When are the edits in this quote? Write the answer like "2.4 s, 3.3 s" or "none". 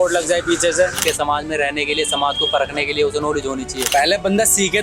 1.0 s, 3.9 s